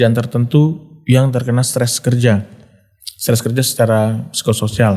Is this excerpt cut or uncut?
uncut